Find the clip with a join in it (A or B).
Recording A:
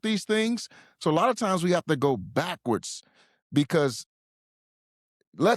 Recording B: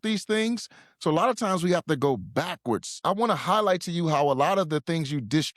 B